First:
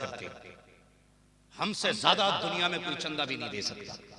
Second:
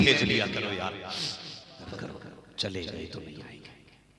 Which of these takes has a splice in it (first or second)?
second